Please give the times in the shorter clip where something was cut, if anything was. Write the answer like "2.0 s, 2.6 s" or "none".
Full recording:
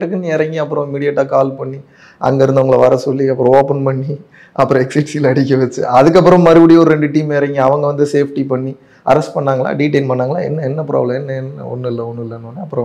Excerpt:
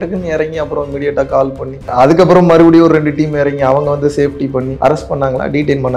1.8 s, 4.7 s